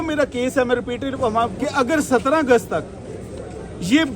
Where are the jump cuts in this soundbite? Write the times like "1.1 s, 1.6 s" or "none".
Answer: 1.6 s